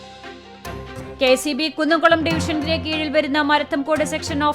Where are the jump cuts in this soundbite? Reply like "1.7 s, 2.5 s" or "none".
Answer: 1.0 s